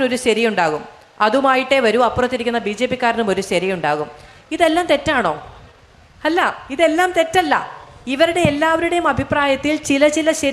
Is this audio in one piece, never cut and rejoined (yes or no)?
yes